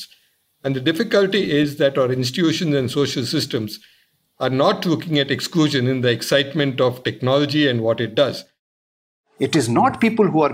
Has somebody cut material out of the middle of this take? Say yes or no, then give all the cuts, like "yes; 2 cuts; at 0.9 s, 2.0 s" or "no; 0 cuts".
yes; 1 cut; at 8.8 s